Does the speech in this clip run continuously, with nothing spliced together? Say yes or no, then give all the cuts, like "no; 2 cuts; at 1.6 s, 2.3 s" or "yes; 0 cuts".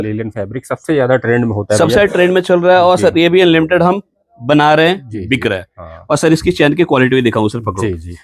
yes; 0 cuts